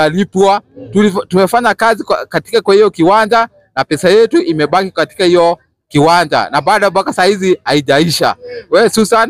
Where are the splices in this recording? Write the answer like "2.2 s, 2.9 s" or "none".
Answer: none